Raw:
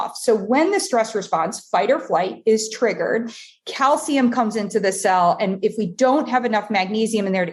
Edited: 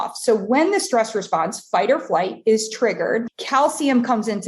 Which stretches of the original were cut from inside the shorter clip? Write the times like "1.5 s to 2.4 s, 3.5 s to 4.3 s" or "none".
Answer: 3.4 s to 3.6 s